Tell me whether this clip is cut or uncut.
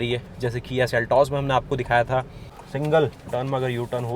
cut